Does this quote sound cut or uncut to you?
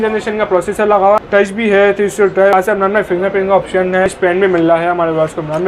cut